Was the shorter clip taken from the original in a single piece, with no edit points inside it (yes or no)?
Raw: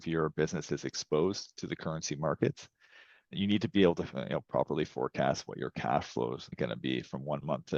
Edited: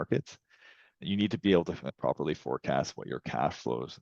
no